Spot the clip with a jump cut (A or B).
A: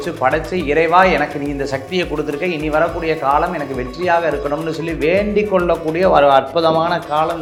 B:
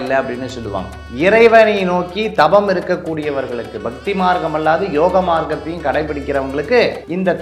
B